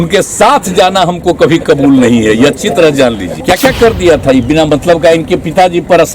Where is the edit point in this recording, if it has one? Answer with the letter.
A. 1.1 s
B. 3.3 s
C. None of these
B